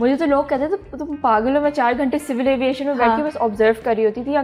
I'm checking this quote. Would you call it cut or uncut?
uncut